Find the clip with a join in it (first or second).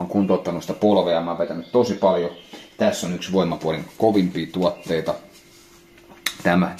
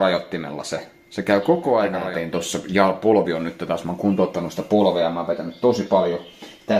second